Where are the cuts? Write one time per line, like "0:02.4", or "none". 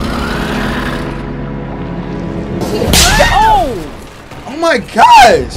none